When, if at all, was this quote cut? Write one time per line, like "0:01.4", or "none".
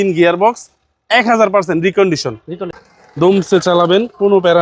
0:02.6